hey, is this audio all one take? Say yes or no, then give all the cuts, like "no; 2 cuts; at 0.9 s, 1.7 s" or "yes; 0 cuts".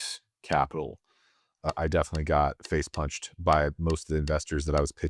no; 1 cut; at 1.7 s